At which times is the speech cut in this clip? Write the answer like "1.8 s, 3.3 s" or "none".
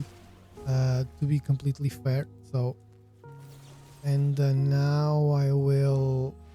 none